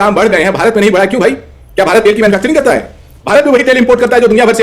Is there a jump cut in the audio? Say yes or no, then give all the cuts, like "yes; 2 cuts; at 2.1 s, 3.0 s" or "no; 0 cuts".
no; 0 cuts